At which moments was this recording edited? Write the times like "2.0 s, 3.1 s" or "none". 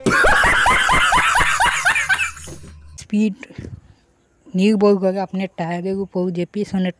3.0 s